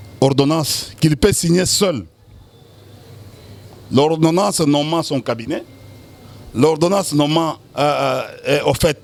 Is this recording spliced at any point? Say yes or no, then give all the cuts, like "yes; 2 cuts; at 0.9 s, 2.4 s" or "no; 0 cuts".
no; 0 cuts